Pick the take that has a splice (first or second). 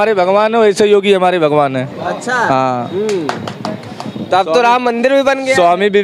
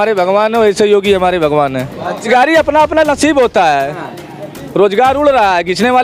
second